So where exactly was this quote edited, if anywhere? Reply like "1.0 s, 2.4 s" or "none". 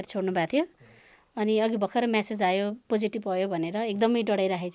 none